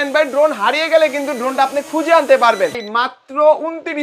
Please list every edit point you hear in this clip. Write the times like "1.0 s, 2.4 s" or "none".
2.7 s